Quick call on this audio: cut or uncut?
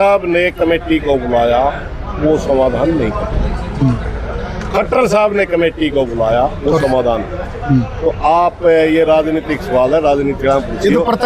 uncut